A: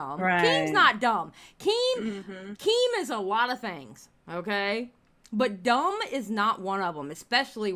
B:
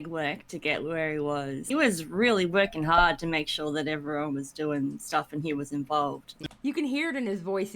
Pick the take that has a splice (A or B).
B